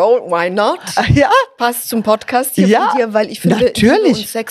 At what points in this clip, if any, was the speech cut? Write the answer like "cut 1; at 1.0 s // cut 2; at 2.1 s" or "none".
none